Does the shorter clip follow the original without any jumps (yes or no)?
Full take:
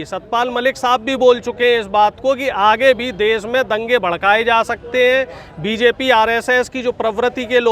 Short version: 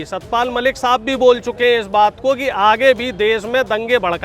yes